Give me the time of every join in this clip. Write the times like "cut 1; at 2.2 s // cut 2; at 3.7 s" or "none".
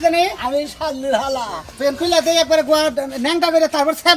none